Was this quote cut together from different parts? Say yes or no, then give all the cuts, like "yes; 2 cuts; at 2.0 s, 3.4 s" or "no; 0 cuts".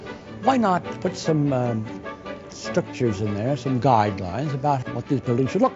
yes; 2 cuts; at 0.9 s, 4.8 s